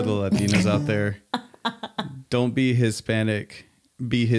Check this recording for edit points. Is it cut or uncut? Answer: uncut